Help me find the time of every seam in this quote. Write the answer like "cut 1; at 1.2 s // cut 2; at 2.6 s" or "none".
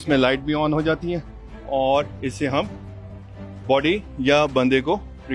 none